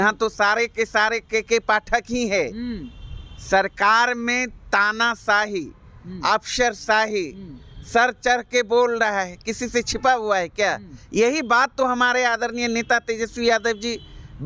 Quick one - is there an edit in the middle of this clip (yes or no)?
no